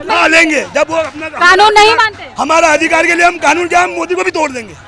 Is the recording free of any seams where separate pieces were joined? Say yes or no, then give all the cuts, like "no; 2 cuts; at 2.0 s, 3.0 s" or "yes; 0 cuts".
yes; 0 cuts